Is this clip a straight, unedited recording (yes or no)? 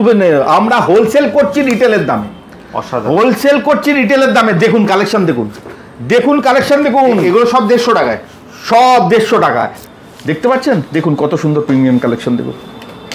no